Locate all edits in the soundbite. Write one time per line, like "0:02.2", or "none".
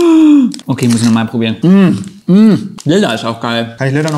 0:01.5
0:02.7